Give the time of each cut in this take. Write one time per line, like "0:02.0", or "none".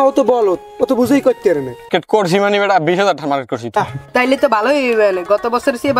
0:01.9
0:03.8